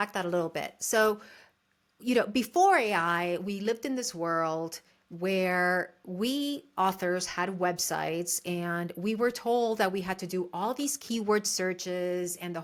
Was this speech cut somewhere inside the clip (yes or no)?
no